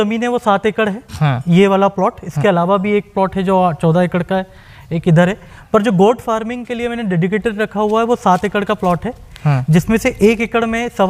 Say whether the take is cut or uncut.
uncut